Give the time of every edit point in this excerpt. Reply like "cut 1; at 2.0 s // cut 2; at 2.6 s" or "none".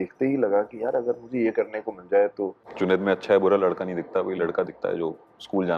cut 1; at 2.6 s